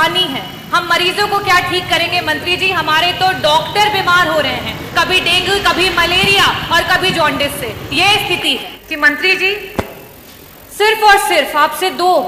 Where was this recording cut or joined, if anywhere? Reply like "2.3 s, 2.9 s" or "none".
8.7 s